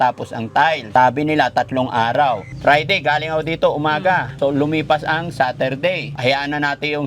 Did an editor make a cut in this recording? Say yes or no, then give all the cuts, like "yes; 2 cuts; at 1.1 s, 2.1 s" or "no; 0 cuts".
yes; 4 cuts; at 0.8 s, 2.5 s, 4.4 s, 6.1 s